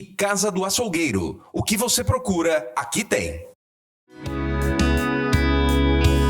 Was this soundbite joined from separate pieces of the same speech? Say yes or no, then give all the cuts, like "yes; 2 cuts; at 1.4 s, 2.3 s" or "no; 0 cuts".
yes; 1 cut; at 4.3 s